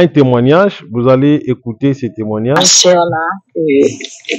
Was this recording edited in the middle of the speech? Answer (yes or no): yes